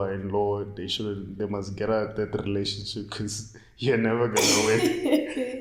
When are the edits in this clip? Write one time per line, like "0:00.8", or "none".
none